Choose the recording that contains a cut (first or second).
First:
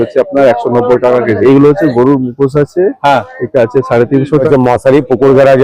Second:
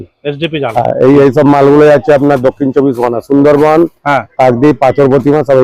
first